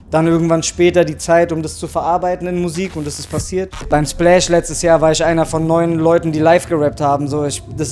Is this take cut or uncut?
cut